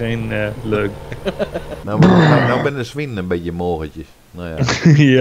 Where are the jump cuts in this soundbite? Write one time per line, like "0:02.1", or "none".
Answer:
0:01.7